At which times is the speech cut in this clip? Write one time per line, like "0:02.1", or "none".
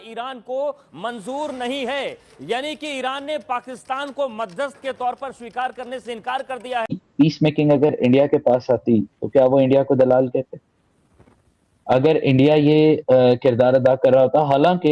0:06.9